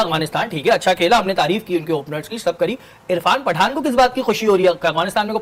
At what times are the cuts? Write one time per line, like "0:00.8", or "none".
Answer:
none